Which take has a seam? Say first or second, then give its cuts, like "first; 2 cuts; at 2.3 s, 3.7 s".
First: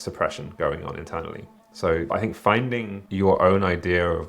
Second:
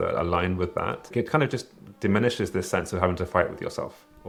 first; 2 cuts; at 2.1 s, 3.0 s